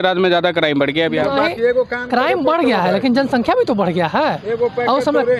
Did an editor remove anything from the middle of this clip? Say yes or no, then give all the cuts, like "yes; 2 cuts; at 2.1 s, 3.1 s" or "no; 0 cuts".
no; 0 cuts